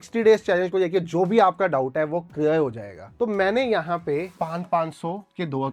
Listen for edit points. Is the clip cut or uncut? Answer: uncut